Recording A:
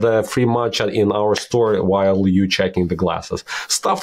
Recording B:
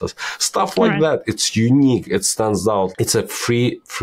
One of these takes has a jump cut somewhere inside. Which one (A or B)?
B